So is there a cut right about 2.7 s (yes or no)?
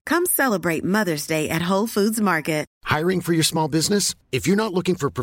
yes